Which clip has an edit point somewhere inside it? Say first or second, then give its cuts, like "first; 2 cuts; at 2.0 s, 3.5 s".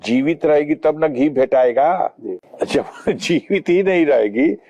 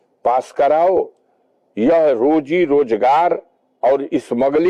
first; 1 cut; at 2.4 s